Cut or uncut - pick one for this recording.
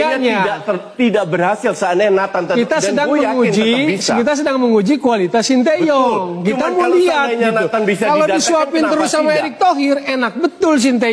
uncut